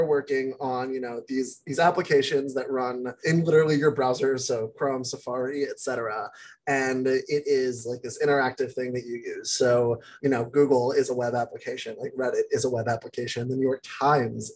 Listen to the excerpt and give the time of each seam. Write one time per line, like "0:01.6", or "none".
0:03.2
0:10.1